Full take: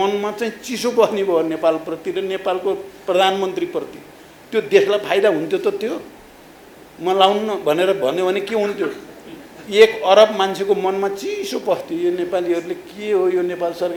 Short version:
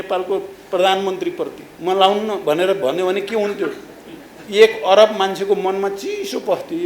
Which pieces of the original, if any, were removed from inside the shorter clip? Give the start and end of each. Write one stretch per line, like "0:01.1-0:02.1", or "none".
0:04.0-0:06.8